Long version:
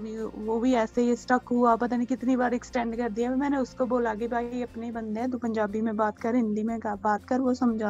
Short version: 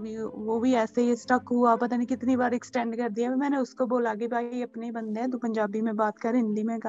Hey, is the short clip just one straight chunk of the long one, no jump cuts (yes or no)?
yes